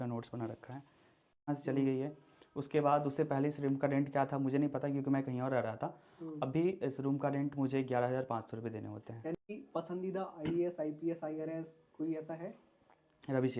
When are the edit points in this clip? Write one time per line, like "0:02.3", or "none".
0:01.4
0:09.5